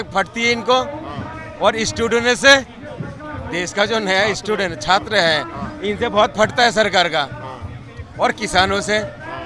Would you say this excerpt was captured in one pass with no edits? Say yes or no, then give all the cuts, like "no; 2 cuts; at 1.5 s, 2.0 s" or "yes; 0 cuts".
yes; 0 cuts